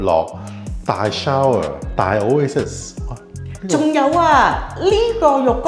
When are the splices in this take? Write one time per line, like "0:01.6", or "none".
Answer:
none